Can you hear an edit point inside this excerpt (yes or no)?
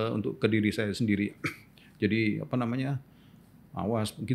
no